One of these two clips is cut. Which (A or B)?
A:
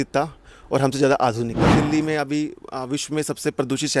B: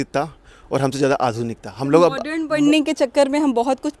A